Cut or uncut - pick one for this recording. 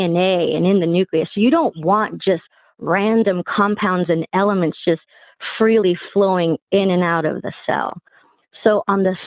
uncut